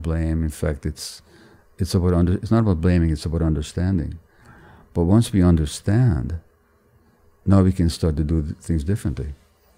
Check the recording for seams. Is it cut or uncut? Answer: uncut